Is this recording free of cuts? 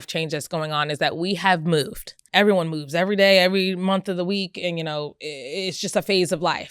no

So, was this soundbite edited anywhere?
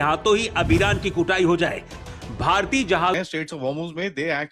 yes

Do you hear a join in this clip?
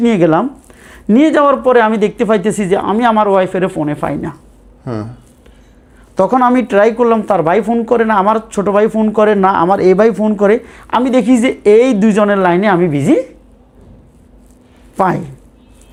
no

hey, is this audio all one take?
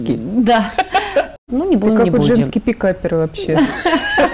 no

